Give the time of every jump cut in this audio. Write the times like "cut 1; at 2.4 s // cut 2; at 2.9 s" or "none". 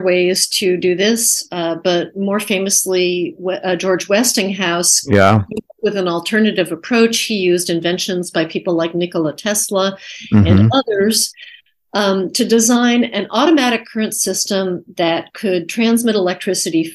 none